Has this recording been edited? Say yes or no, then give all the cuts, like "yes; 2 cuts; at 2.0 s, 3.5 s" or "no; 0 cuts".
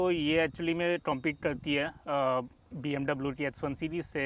no; 0 cuts